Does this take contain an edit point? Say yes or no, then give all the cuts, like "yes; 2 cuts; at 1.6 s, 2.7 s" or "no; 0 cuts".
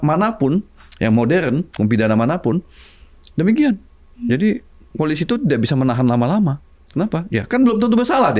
no; 0 cuts